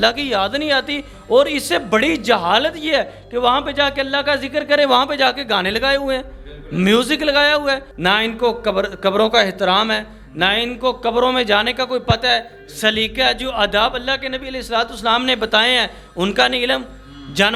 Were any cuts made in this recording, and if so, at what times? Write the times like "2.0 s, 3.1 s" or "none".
7.9 s